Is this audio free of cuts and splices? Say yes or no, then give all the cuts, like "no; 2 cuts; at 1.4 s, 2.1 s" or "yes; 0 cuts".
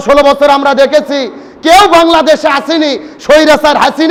yes; 0 cuts